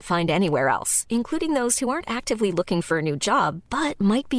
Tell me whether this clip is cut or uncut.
uncut